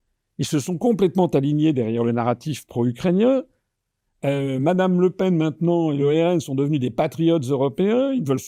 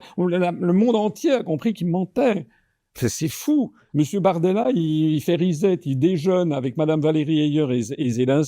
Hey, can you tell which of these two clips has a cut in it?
second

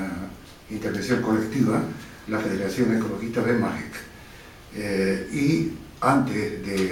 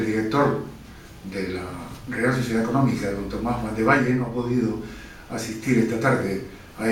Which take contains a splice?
second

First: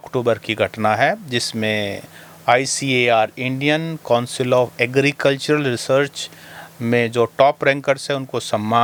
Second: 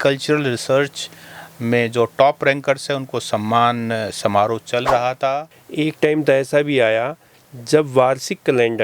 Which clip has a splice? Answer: second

